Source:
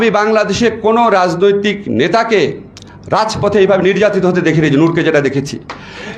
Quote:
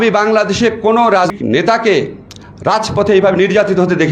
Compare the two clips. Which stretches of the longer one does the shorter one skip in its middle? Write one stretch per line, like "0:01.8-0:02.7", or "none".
0:01.3-0:01.8